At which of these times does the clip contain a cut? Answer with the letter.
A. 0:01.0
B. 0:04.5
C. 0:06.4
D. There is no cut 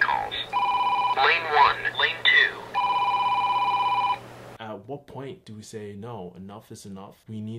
B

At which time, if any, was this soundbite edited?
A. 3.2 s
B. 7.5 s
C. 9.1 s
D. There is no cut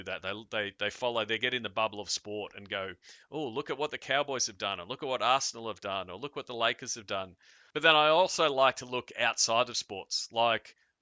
B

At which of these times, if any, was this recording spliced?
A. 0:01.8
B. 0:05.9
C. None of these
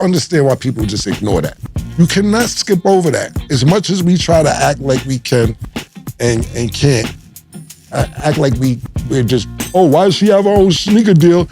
A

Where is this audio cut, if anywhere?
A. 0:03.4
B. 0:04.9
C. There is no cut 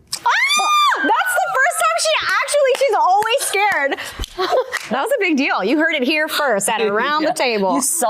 B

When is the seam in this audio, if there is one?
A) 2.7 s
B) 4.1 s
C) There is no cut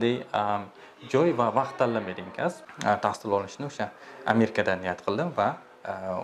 A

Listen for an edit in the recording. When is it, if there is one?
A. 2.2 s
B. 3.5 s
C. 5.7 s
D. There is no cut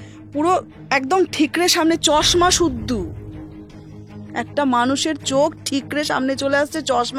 D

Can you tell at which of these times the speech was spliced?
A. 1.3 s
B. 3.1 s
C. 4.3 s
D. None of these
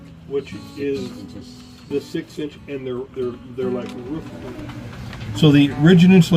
C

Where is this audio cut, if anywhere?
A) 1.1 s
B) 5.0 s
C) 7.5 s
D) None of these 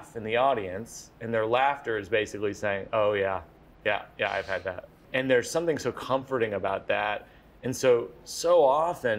B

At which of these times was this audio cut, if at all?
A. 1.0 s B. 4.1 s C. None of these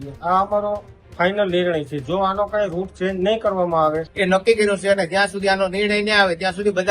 B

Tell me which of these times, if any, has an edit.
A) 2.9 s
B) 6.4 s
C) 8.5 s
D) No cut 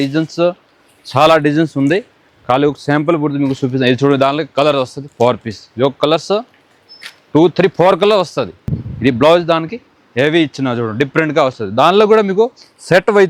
C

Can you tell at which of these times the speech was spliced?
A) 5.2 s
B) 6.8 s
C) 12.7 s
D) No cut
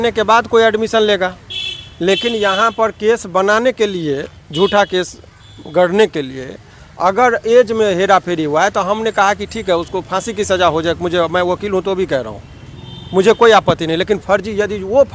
D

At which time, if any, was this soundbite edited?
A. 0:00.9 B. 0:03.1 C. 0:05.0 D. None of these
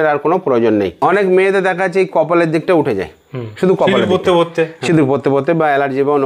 A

